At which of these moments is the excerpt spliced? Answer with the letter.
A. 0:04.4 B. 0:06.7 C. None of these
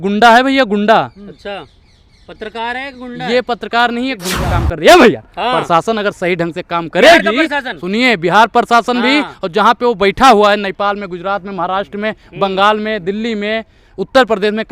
A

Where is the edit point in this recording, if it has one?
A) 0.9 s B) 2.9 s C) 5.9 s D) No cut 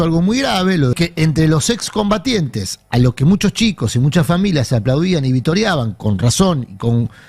A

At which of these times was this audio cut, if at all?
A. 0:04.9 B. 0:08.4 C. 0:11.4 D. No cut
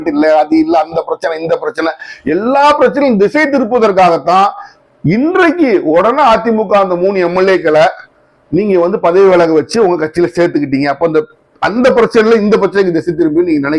D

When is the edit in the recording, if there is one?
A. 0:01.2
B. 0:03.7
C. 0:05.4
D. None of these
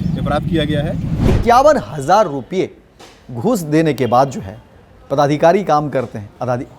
A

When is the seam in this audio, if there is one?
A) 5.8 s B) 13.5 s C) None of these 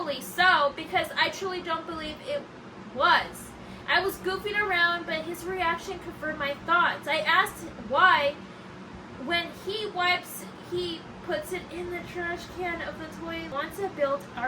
B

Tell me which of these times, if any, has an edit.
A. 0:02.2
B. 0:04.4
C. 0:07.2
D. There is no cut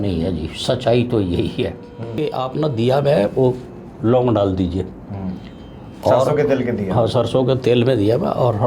A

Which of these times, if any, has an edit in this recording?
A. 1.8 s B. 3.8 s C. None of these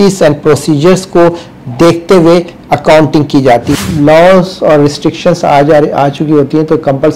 B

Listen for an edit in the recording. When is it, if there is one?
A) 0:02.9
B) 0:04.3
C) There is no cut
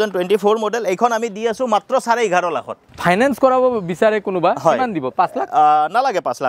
A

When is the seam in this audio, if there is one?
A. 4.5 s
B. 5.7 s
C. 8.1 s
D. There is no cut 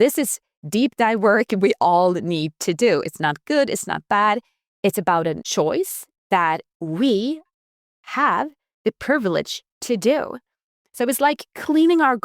B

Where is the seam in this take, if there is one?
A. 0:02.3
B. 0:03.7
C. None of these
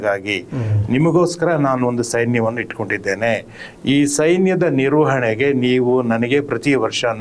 C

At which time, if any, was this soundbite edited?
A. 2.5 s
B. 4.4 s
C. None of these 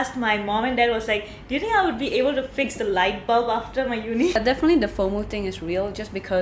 B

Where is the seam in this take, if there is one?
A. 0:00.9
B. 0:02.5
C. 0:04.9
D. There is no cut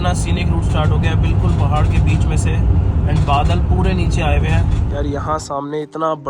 C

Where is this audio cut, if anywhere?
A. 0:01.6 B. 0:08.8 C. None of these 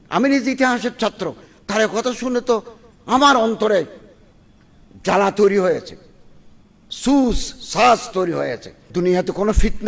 B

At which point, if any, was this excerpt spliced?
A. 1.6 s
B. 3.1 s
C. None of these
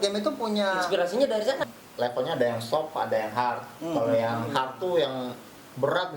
A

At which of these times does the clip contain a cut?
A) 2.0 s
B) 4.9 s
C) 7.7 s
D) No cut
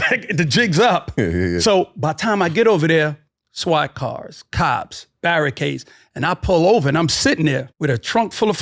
C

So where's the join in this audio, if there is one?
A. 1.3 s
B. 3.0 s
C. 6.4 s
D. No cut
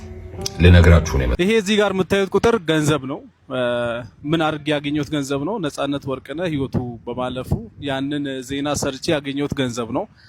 A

